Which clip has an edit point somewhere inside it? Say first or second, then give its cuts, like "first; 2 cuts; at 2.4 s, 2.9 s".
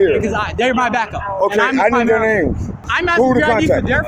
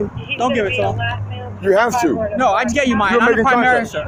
first; 1 cut; at 2.9 s